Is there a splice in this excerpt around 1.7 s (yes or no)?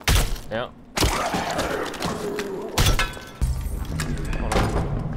no